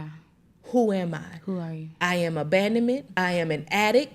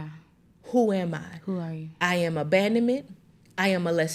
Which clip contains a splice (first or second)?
first